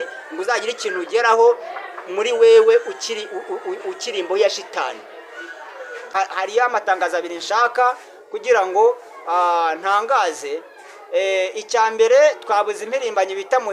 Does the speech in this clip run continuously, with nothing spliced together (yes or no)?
no